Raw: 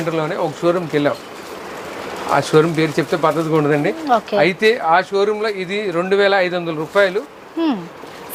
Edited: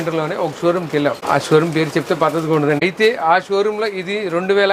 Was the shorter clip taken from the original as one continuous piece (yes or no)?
no